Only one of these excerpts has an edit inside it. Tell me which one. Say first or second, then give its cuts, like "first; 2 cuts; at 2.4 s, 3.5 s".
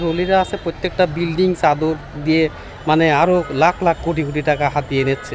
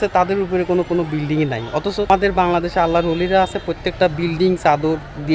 second; 1 cut; at 2.1 s